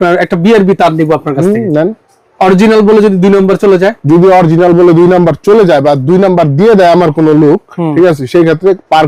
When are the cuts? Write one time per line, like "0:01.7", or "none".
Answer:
none